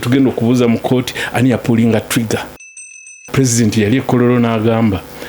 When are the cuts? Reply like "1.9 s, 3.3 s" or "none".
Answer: 2.9 s